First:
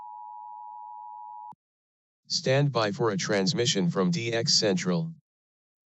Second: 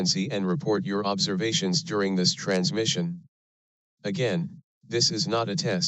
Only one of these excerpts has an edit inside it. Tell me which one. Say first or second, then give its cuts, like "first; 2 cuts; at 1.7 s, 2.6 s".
first; 1 cut; at 1.5 s